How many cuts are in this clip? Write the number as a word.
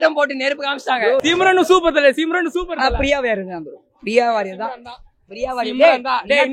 one